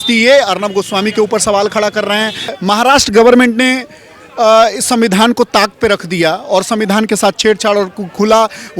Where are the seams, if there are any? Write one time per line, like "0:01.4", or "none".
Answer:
0:02.5